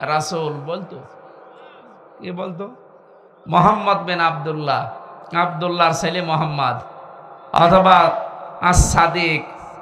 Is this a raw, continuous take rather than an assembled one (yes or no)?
yes